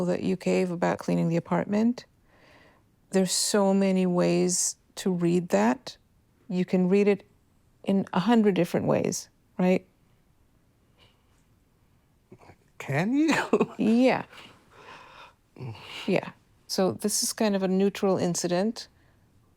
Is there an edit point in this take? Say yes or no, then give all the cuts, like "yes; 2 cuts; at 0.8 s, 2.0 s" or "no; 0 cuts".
yes; 1 cut; at 1.0 s